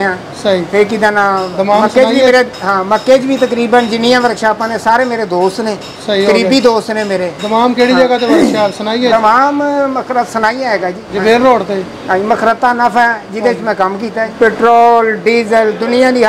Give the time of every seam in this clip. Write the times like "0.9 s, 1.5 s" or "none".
11.0 s, 14.3 s